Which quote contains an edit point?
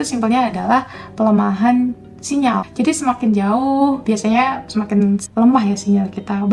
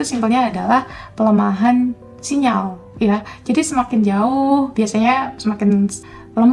first; 2 cuts; at 2.7 s, 5.3 s

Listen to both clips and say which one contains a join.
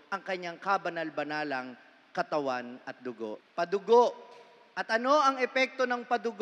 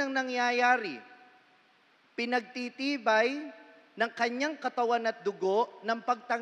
first; 1 cut; at 3.4 s

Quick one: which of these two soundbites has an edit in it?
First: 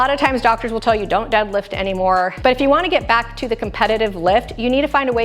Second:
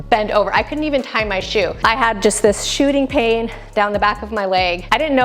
first; 1 cut; at 2.4 s

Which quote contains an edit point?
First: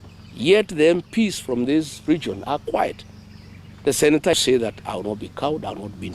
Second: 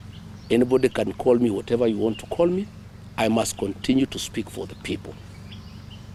first; 1 cut; at 4.3 s

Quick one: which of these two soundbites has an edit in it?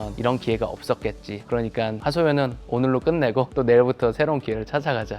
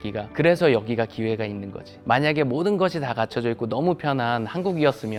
first; 1 cut; at 1.6 s

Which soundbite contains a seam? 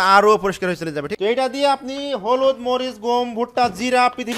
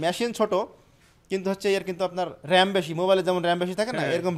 first; 1 cut; at 1.1 s

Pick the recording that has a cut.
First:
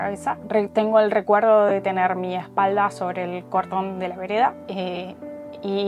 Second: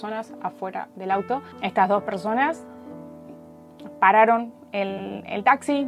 second; 1 cut; at 1.5 s

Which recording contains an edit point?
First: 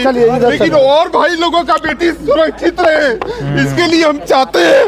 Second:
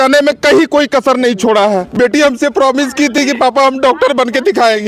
second; 1 cut; at 1.9 s

